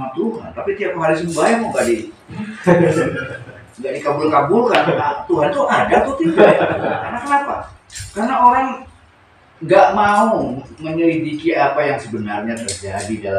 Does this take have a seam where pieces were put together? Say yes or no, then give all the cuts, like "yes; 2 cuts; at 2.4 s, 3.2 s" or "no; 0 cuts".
yes; 1 cut; at 7.0 s